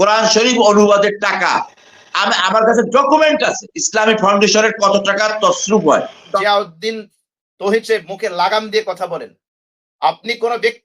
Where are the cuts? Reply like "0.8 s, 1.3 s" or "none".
6.3 s